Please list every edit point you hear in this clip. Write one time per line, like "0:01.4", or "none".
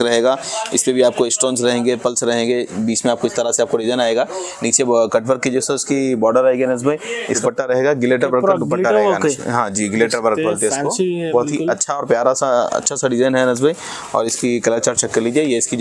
none